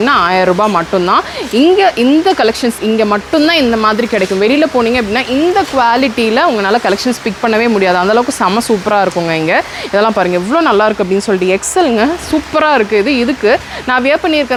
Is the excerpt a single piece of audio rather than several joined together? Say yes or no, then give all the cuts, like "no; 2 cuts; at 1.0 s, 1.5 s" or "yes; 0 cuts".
yes; 0 cuts